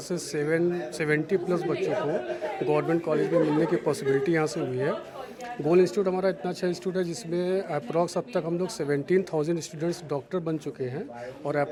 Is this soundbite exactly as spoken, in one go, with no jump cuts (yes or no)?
yes